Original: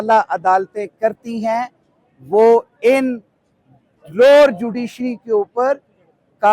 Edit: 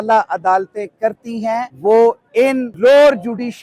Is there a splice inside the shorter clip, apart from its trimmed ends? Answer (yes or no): yes